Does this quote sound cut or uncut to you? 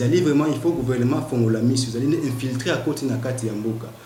uncut